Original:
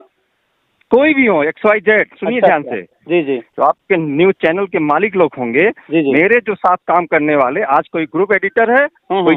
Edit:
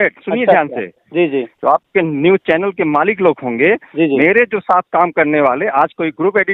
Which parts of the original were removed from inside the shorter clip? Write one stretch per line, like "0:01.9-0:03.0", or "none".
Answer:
none